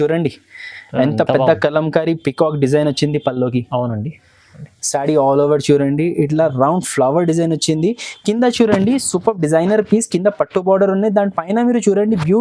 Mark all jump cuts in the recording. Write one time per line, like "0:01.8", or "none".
none